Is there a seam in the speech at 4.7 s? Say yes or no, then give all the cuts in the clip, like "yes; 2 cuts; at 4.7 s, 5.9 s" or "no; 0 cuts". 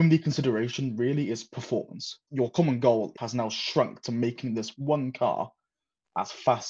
no; 2 cuts; at 2.2 s, 3.2 s